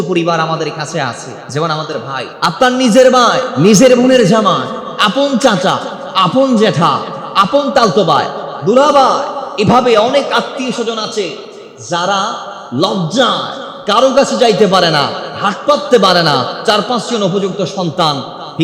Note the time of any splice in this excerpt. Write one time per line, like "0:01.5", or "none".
0:01.3
0:02.3
0:03.4